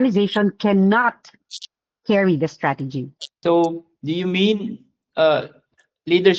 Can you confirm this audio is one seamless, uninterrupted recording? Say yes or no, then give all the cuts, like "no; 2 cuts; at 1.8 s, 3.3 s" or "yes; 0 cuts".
no; 1 cut; at 3.3 s